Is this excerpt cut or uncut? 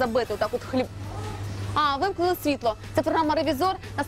uncut